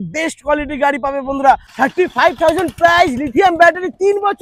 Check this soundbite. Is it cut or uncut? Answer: cut